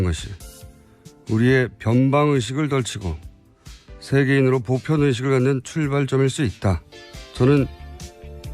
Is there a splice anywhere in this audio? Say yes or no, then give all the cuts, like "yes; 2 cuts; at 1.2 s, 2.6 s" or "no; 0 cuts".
yes; 1 cut; at 2.7 s